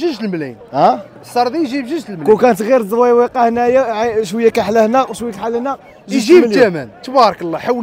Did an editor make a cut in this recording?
no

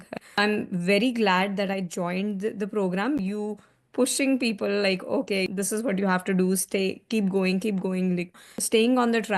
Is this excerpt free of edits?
no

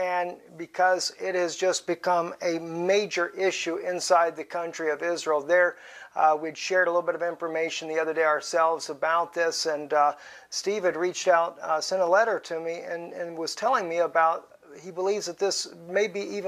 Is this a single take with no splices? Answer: no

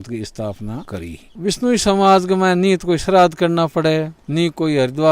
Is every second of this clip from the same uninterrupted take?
no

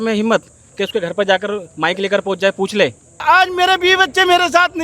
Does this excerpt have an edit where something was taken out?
yes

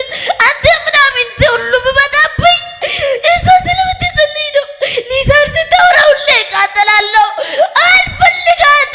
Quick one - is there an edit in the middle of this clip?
no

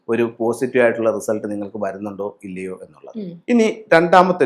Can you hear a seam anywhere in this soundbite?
no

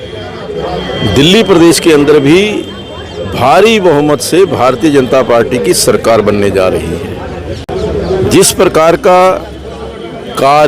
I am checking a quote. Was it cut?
no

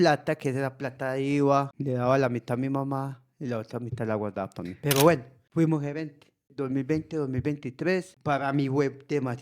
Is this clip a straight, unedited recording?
no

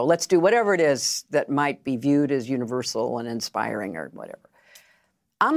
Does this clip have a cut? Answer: no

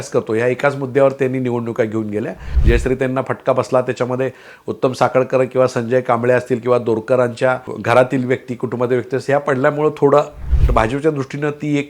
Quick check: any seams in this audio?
yes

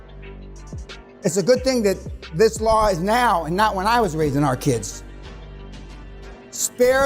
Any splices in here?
yes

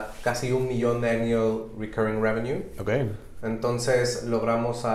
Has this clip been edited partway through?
no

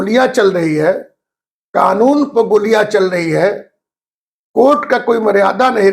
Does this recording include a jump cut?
no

